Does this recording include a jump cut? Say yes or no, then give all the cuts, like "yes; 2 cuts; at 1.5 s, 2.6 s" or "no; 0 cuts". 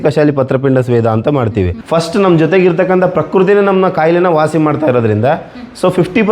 yes; 1 cut; at 1.8 s